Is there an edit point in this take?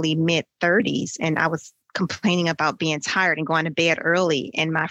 no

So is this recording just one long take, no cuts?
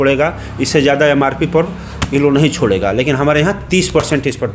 yes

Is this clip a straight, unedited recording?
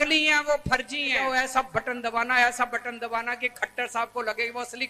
no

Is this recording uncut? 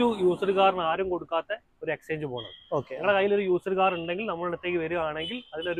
yes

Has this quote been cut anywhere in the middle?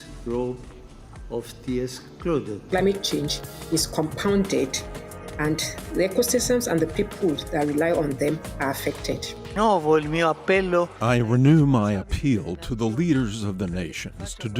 no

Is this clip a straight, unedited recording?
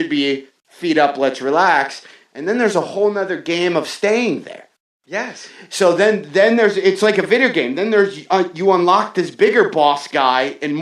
no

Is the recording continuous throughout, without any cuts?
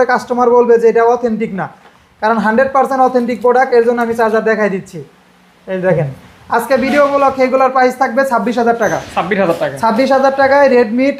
yes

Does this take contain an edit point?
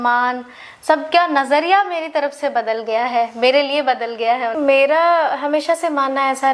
yes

